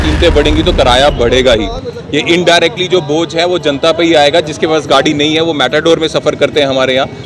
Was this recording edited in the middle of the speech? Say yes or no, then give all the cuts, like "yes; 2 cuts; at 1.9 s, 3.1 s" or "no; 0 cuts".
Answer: no; 0 cuts